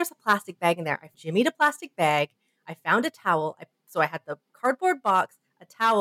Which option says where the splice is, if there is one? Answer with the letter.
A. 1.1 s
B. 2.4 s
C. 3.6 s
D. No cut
A